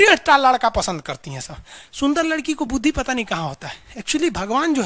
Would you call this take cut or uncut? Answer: uncut